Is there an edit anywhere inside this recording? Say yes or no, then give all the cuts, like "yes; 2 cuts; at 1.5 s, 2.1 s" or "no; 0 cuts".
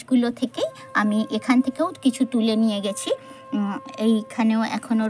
no; 0 cuts